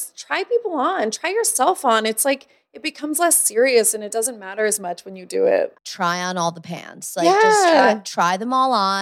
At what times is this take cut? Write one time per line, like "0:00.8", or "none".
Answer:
0:05.8